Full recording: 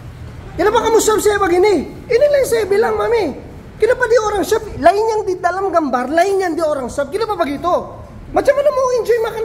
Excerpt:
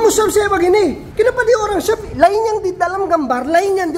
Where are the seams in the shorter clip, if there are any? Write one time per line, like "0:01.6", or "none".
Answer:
0:01.0